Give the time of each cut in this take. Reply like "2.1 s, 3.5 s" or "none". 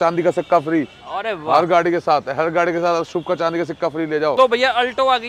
4.3 s

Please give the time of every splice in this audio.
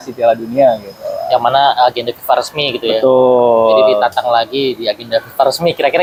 none

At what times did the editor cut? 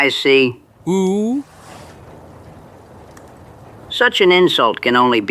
none

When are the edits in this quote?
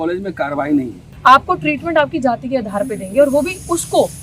1.0 s

